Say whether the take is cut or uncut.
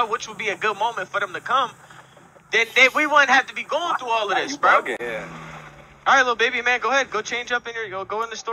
cut